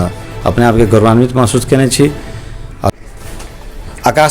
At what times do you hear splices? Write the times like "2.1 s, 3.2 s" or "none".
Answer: 2.9 s